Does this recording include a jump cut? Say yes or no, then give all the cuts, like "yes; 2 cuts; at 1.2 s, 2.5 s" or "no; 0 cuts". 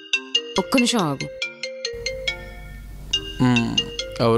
no; 0 cuts